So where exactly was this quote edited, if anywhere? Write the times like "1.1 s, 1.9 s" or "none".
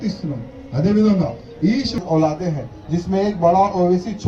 2.0 s